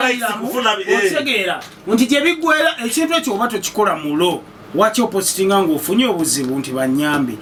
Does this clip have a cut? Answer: no; 0 cuts

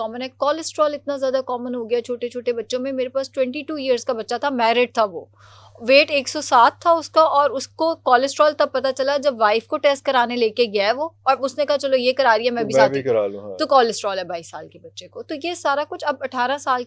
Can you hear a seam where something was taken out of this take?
no; 0 cuts

